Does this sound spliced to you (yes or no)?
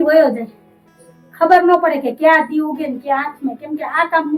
no